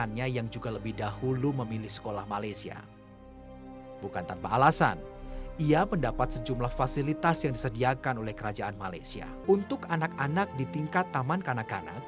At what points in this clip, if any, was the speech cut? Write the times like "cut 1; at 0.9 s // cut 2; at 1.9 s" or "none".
cut 1; at 9.3 s